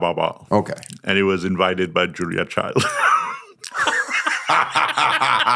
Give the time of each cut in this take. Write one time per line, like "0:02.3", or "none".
none

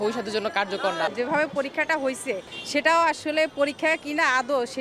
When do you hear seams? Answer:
0:01.1
0:02.5

